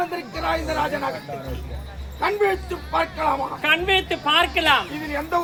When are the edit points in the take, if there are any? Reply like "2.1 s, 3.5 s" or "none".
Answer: none